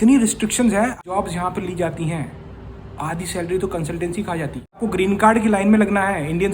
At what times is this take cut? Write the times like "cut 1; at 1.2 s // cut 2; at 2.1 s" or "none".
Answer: cut 1; at 1.0 s // cut 2; at 4.8 s